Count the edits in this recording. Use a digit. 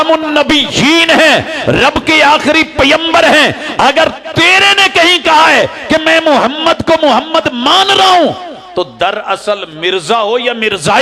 0